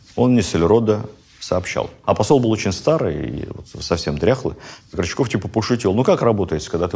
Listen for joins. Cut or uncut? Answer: cut